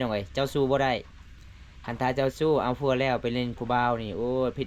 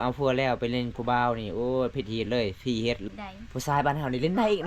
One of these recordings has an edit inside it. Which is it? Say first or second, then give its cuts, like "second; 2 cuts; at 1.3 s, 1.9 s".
second; 1 cut; at 3.0 s